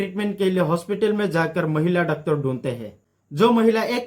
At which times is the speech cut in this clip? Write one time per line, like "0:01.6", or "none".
0:03.0